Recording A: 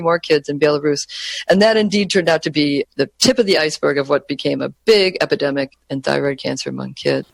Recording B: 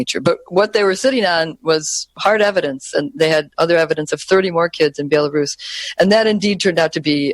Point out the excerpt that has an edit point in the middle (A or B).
B